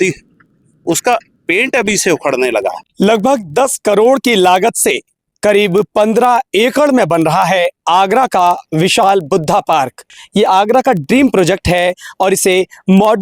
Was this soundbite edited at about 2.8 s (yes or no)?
yes